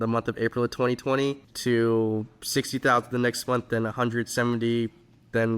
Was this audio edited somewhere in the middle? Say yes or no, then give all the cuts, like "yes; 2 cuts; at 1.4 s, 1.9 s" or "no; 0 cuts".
yes; 1 cut; at 1.5 s